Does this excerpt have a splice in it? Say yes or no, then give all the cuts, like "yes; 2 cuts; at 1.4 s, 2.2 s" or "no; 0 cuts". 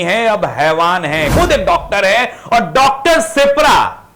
yes; 1 cut; at 1.3 s